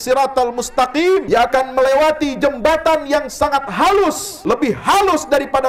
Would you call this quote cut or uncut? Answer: cut